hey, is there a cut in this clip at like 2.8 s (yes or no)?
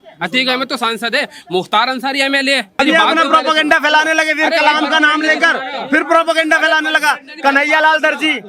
yes